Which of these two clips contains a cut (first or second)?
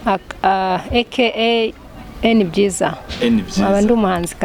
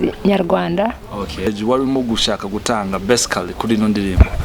second